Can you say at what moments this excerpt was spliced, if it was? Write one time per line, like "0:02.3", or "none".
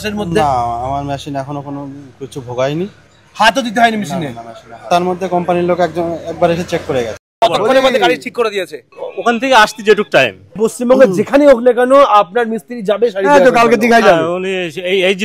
0:04.8
0:07.2
0:10.5